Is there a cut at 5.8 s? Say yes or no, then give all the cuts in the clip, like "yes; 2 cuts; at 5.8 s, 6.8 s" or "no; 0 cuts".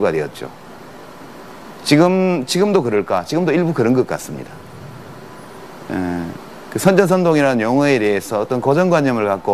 no; 1 cut; at 1.8 s